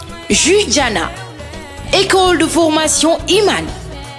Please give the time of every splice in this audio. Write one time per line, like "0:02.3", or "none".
none